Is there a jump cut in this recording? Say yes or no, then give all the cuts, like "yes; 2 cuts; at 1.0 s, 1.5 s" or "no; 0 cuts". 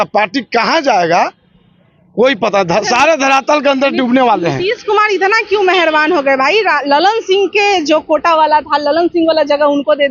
no; 0 cuts